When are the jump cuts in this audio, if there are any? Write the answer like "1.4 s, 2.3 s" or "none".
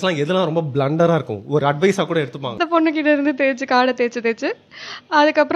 2.6 s